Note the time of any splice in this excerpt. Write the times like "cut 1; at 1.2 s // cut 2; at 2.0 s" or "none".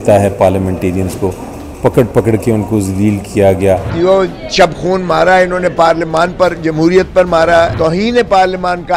cut 1; at 3.9 s // cut 2; at 7.7 s